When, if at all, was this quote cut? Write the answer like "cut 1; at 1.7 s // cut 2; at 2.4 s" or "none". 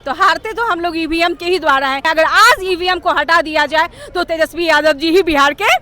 cut 1; at 2.0 s